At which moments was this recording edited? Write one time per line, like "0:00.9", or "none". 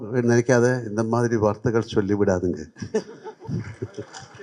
none